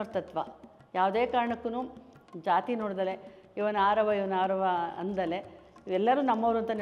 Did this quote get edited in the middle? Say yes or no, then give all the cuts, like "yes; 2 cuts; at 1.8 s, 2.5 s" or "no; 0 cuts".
no; 0 cuts